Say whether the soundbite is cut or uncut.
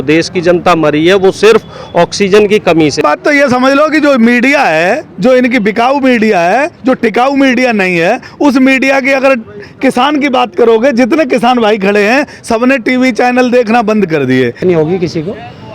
cut